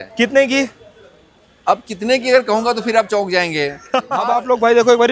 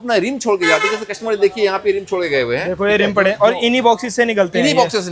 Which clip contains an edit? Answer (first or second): first